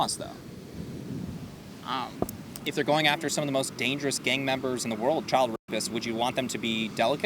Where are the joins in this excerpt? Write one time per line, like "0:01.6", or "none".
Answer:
0:02.5
0:05.2